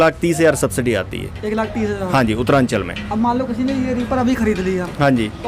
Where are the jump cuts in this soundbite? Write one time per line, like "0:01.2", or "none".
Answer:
none